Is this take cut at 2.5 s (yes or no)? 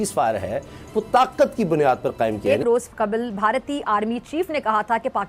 yes